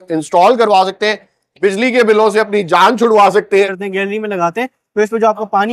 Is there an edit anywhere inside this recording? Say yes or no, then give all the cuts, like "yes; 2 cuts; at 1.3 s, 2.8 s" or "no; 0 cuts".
yes; 1 cut; at 3.8 s